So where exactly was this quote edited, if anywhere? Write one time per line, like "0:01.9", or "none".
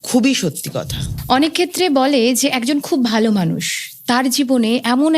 0:01.0